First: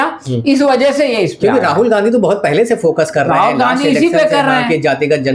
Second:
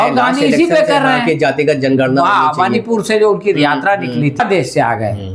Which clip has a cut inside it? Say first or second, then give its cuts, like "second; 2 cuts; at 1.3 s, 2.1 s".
second; 1 cut; at 4.4 s